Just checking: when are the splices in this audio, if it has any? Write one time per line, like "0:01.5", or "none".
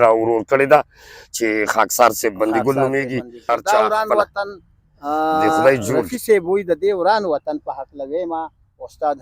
0:03.5